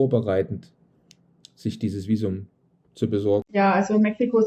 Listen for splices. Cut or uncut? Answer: cut